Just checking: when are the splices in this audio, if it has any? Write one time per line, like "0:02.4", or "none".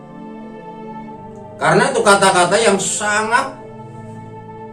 0:01.5